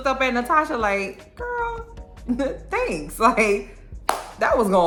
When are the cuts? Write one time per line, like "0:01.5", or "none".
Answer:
none